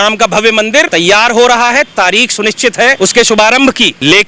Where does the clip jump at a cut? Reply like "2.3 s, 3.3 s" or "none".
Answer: 0.9 s, 3.0 s

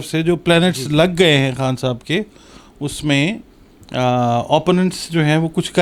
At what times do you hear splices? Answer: none

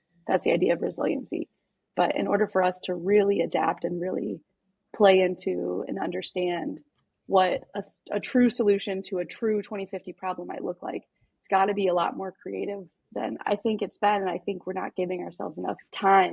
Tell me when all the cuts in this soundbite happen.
none

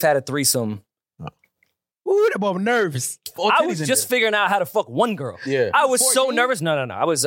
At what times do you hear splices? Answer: 3.3 s

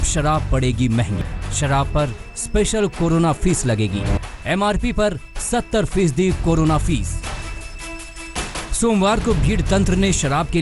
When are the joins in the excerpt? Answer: 1.2 s, 4.2 s

